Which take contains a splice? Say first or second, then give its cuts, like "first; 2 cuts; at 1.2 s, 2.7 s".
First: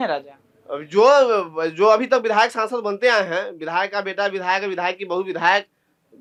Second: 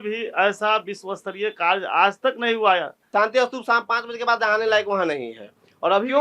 second; 1 cut; at 3.0 s